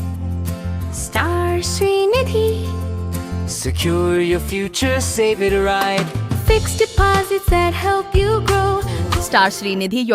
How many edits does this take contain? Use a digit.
1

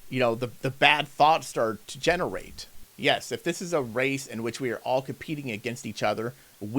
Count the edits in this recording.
1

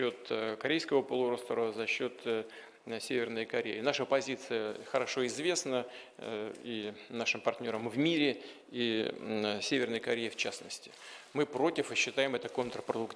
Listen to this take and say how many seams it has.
0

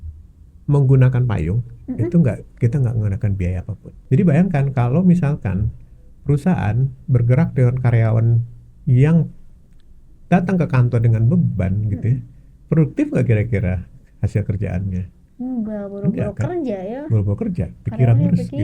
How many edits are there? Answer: 1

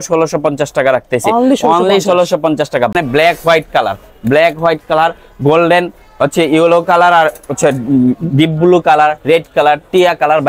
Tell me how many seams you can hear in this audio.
1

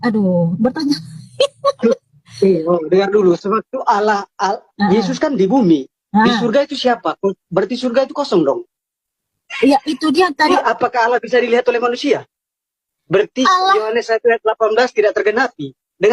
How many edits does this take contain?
1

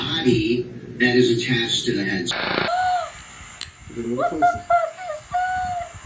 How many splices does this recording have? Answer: 1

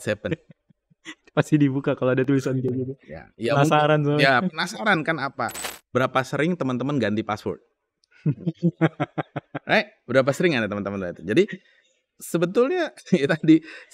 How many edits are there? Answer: 1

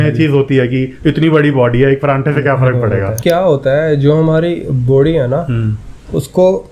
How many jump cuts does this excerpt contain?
1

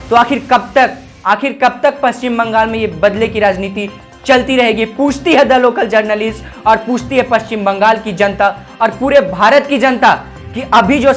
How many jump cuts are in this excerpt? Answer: 0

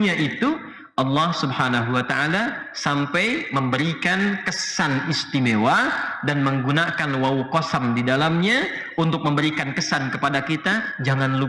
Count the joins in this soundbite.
0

